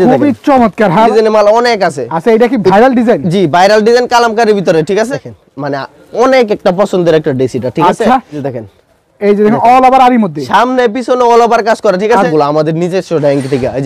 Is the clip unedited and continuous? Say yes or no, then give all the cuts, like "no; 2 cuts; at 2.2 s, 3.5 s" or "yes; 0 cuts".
no; 4 cuts; at 1.1 s, 5.1 s, 8.4 s, 12.3 s